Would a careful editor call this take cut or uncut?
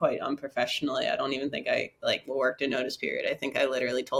uncut